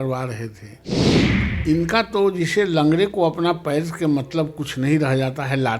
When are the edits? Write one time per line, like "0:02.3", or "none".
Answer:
none

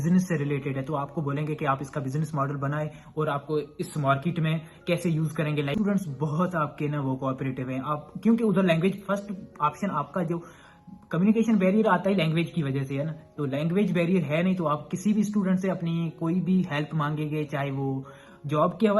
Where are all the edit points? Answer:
0:05.7

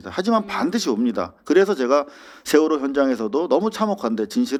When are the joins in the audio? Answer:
none

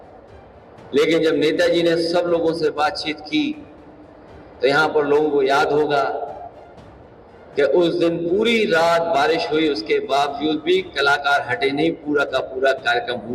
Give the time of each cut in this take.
0:11.2

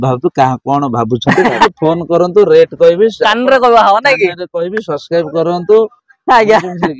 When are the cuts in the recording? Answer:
0:01.7

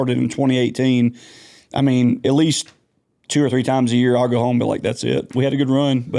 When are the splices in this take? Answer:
none

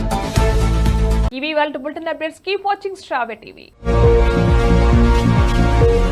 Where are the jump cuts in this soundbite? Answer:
none

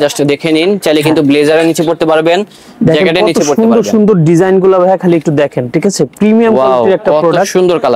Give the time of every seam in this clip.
none

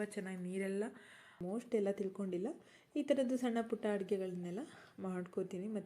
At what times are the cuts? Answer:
0:01.4

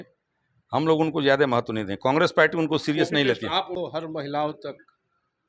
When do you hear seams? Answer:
0:03.8

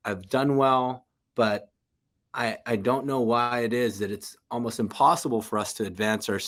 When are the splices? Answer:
none

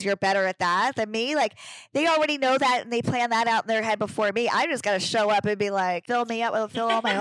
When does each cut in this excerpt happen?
0:06.0

